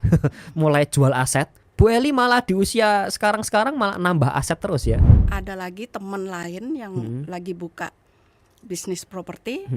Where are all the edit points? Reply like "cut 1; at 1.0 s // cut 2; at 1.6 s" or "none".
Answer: cut 1; at 1.6 s // cut 2; at 5.2 s